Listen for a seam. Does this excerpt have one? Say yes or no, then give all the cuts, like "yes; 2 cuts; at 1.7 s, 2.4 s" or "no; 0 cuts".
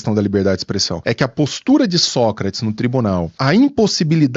yes; 2 cuts; at 0.9 s, 3.4 s